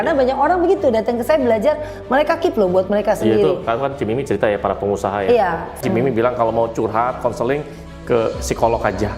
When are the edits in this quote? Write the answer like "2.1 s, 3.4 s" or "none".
5.8 s